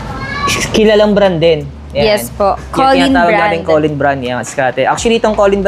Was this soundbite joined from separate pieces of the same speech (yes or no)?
no